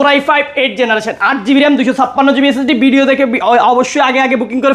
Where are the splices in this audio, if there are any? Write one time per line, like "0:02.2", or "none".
none